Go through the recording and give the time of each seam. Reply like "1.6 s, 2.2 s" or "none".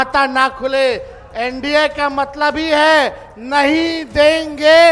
none